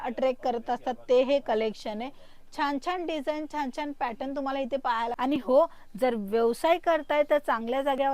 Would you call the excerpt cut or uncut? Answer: cut